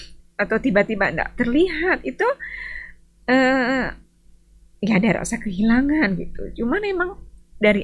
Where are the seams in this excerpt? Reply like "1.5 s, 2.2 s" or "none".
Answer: none